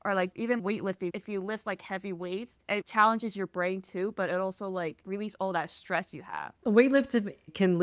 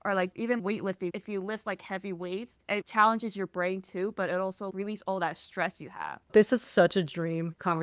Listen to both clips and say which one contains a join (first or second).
second